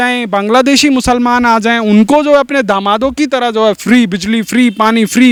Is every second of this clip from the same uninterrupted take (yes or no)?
yes